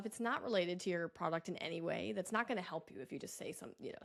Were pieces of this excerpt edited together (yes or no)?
no